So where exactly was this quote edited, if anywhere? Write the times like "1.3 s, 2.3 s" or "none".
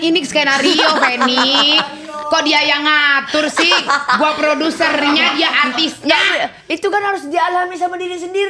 none